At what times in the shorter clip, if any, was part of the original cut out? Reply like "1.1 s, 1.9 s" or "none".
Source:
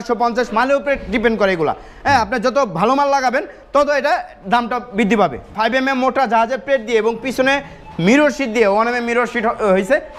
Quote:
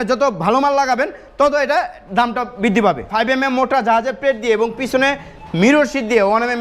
3.0 s